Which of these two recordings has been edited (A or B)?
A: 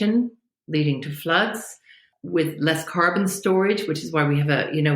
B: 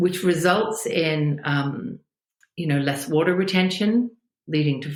A